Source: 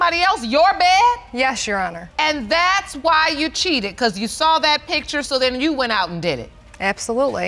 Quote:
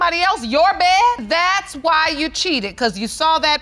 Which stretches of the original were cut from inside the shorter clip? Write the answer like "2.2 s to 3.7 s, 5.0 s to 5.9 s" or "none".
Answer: 1.2 s to 2.4 s